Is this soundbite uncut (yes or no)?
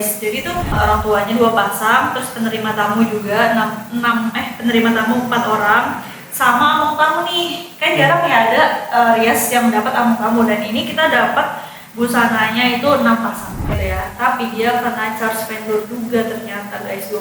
no